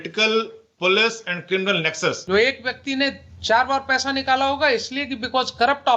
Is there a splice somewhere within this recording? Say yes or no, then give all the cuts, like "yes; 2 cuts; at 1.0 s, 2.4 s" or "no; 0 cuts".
yes; 1 cut; at 2.2 s